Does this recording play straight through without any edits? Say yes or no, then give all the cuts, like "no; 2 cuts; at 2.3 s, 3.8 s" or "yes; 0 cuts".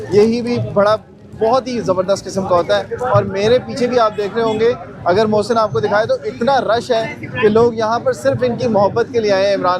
yes; 0 cuts